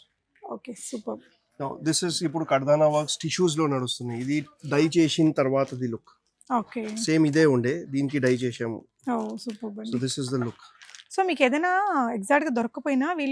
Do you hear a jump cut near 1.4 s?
no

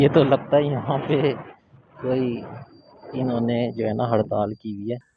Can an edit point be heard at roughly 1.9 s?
no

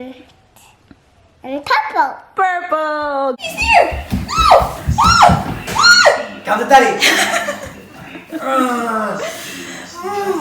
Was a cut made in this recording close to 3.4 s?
yes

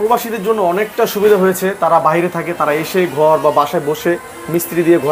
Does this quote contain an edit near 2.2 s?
no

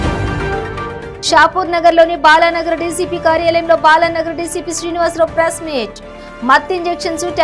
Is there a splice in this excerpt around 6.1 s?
no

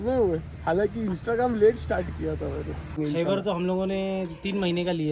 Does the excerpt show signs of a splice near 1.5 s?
no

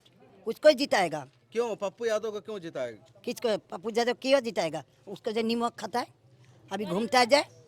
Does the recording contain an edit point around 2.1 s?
no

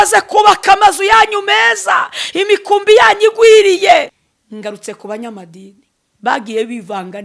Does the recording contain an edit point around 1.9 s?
no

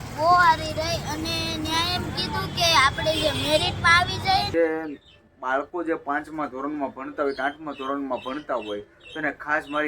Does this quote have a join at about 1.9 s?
no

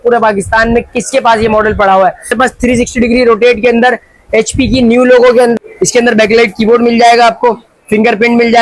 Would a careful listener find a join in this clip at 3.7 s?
no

